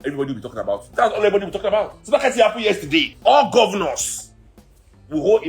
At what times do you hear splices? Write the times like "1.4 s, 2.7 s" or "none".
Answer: 0.9 s, 2.0 s, 3.1 s